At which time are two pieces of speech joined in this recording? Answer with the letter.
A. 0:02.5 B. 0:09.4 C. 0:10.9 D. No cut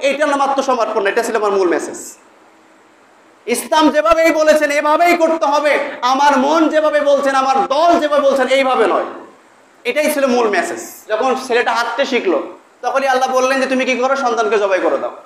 C